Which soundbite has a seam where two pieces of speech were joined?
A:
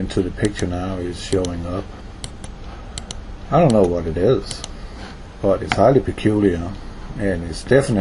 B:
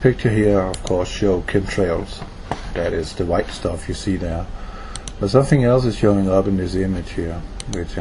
A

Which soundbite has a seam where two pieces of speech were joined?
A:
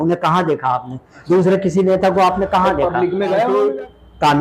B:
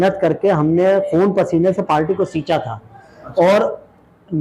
A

